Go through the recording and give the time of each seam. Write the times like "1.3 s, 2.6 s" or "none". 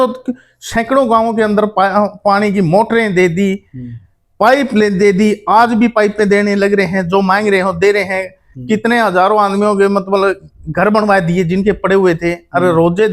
none